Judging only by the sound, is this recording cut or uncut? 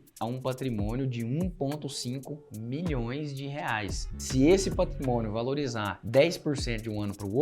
cut